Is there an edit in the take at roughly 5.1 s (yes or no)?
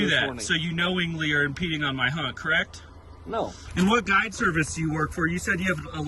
no